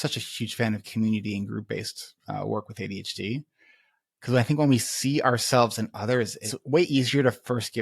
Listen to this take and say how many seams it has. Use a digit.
1